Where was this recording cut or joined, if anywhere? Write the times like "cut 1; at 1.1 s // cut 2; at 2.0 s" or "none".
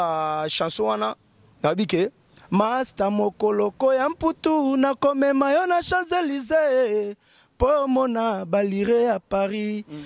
none